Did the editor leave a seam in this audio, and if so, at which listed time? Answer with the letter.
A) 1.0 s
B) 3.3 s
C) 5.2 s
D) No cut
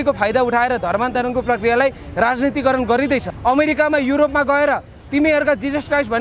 B